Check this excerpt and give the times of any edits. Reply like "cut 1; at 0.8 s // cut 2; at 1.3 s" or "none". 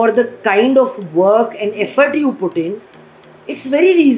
none